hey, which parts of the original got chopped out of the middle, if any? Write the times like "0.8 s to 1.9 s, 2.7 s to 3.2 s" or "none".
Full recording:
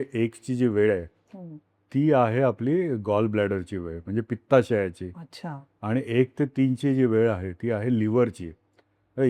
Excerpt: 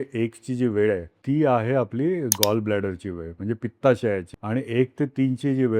1.1 s to 1.8 s, 5.0 s to 5.7 s